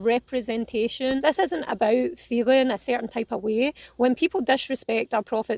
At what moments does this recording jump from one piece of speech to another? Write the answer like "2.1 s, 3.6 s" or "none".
none